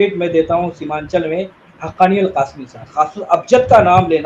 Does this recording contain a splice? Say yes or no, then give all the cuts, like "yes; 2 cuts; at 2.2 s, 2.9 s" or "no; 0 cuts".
yes; 1 cut; at 2.8 s